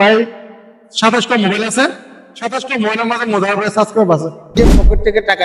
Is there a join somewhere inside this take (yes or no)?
yes